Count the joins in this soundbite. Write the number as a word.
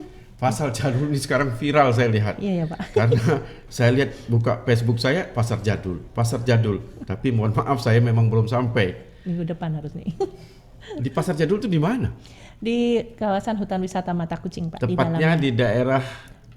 zero